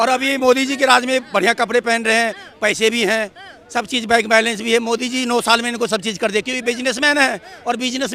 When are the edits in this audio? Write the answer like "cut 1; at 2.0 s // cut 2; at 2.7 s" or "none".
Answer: none